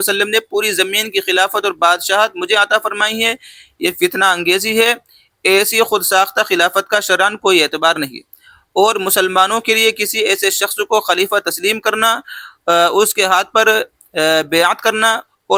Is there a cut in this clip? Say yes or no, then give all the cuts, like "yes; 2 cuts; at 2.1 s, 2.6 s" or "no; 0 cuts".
no; 0 cuts